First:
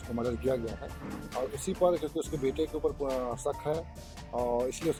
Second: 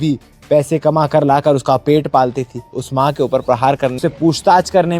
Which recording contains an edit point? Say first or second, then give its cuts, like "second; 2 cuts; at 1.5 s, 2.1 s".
second; 1 cut; at 4.0 s